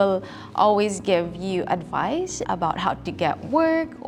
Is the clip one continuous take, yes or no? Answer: yes